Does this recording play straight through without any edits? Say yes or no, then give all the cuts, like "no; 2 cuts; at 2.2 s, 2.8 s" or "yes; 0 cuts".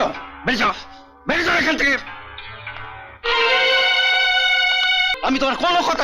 no; 1 cut; at 5.1 s